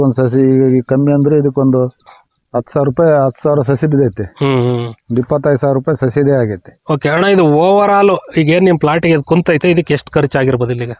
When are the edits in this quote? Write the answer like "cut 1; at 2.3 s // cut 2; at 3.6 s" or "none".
none